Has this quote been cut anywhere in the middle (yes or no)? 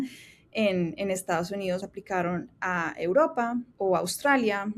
yes